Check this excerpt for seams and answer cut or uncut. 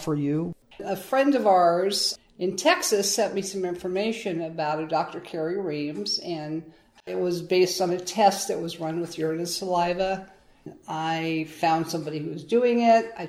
cut